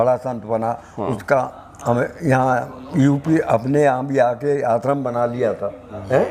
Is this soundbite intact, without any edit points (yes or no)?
yes